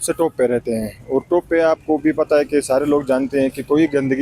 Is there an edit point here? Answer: no; 0 cuts

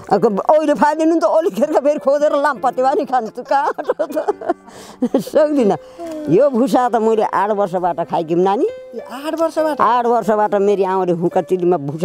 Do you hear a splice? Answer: no; 0 cuts

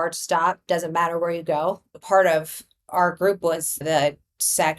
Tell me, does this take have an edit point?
yes; 2 cuts; at 2.0 s, 3.8 s

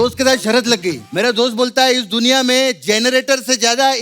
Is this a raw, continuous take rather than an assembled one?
no; 1 cut; at 1.0 s

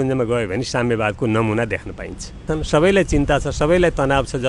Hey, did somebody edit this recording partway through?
yes; 1 cut; at 2.5 s

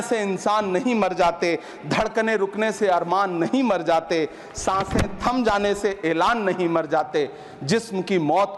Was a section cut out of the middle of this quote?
no; 0 cuts

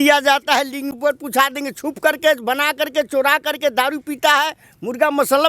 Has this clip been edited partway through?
yes; 1 cut; at 0.9 s

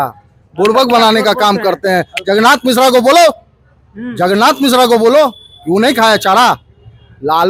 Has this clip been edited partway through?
no; 0 cuts

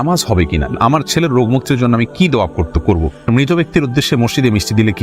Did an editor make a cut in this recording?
yes; 2 cuts; at 0.7 s, 3.2 s

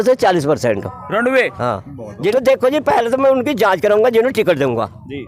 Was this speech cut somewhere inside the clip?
yes; 1 cut; at 2.3 s

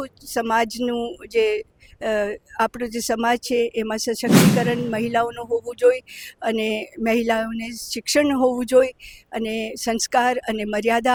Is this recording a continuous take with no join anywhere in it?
yes; 0 cuts

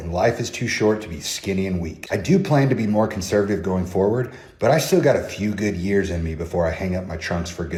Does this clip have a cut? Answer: no; 0 cuts

